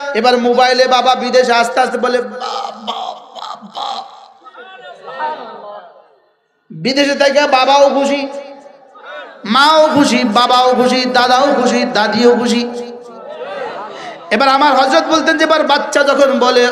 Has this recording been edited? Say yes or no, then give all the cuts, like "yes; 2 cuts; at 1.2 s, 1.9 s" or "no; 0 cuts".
no; 0 cuts